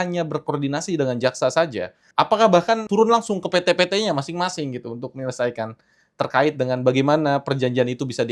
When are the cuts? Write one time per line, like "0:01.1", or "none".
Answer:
0:02.0
0:02.8